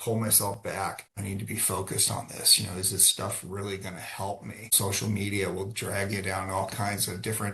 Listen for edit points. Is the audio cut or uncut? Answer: cut